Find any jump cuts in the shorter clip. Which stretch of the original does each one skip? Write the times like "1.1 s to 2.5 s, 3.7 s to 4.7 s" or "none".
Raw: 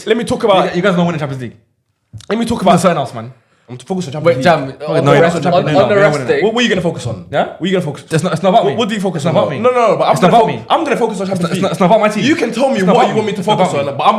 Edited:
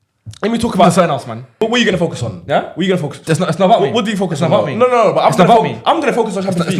3.5 s to 6.5 s